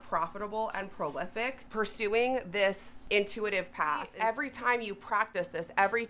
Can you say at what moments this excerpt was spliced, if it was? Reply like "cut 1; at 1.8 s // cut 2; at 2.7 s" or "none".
cut 1; at 1.6 s // cut 2; at 2.9 s // cut 3; at 4.1 s